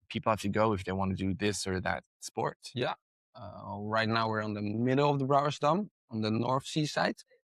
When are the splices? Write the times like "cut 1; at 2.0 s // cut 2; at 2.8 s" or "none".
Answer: none